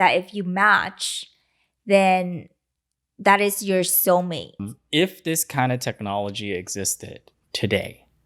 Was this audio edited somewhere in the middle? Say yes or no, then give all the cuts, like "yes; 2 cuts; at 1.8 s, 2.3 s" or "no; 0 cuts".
yes; 1 cut; at 4.7 s